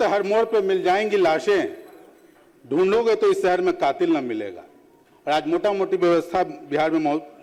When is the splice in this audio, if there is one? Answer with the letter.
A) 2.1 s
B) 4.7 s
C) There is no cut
C